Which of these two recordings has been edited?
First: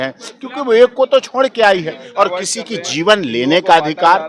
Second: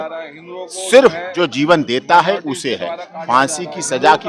first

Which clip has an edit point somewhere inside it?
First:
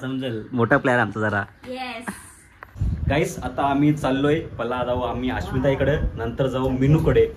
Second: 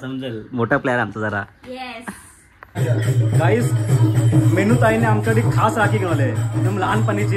second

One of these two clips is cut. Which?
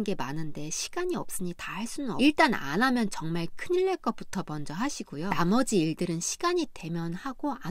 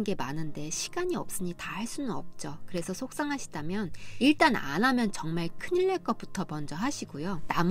first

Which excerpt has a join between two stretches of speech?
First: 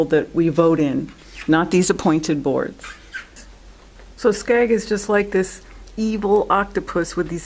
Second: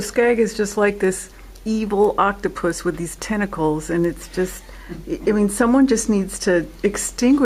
first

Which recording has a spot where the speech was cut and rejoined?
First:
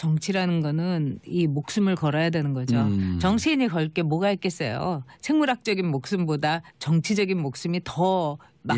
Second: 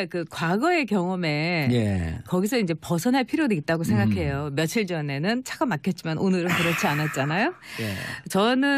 first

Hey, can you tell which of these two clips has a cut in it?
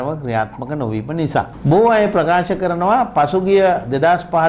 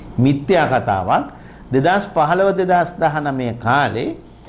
first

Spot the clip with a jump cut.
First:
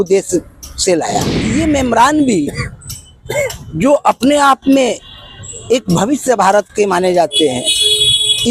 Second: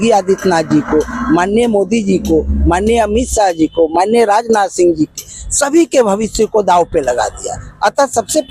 first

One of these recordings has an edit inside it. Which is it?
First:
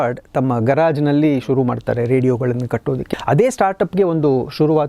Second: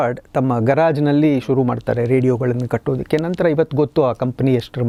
first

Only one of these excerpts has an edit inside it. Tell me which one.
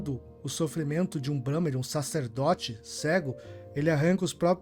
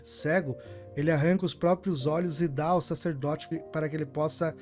second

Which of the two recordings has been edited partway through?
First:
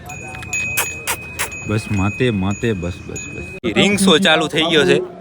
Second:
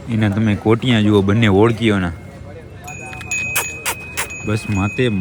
first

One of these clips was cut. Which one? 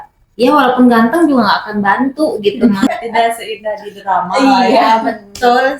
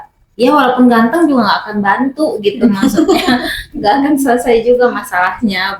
first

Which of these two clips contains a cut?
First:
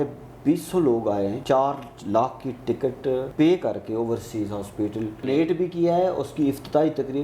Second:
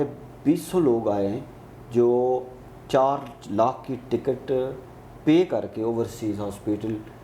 first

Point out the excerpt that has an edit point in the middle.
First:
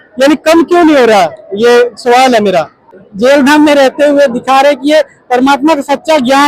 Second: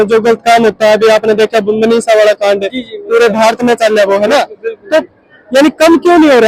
first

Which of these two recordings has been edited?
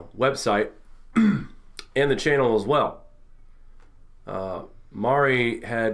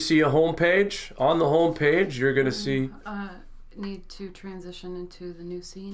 second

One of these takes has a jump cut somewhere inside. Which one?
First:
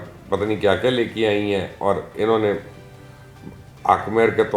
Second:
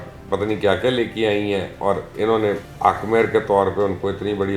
second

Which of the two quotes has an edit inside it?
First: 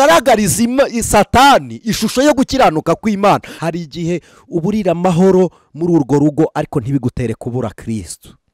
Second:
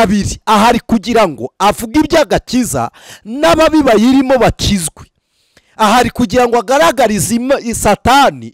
first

